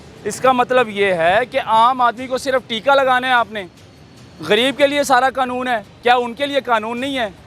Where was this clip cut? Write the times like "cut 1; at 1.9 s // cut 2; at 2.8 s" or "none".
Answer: cut 1; at 5.9 s

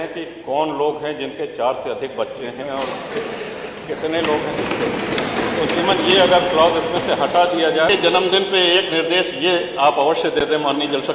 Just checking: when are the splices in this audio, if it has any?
cut 1; at 7.9 s

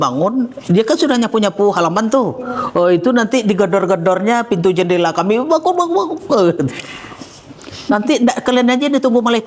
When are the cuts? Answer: none

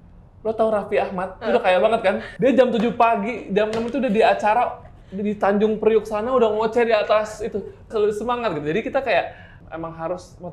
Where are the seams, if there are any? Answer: cut 1; at 2.3 s // cut 2; at 7.9 s

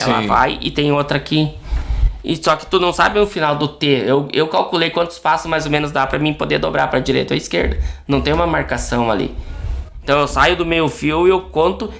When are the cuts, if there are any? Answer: none

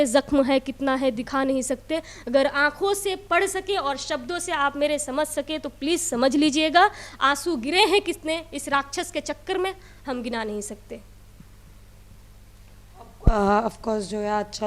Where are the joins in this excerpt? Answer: none

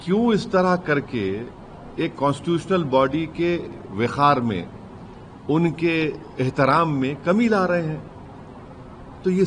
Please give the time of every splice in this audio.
none

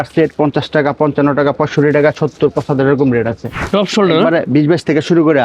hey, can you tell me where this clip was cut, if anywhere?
cut 1; at 3.6 s

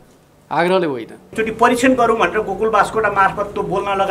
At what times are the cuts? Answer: cut 1; at 1.3 s

